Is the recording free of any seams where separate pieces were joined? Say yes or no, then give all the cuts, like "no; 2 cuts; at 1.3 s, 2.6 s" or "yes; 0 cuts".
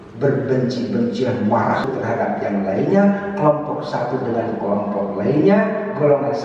no; 1 cut; at 1.9 s